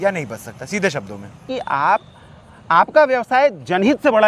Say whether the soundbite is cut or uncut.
cut